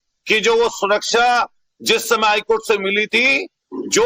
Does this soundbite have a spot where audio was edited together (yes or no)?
yes